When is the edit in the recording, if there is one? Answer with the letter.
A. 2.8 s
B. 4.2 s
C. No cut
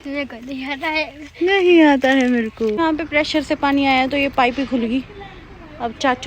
A